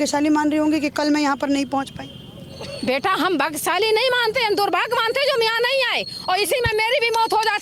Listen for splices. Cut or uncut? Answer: uncut